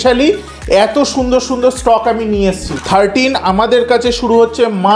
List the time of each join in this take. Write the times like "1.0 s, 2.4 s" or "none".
2.7 s